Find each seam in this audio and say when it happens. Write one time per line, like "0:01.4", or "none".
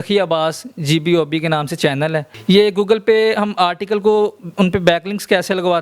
0:02.3